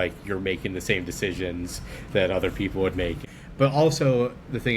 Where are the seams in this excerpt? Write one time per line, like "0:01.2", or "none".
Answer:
0:03.3